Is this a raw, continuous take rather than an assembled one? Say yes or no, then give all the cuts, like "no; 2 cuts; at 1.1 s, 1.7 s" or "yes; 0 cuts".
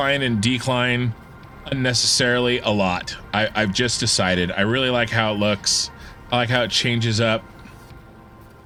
yes; 0 cuts